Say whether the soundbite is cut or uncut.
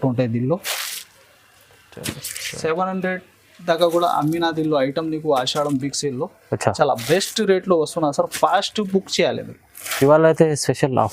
uncut